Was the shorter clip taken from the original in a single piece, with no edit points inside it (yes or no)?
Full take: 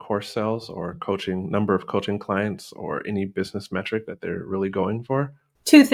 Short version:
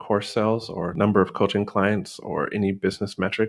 no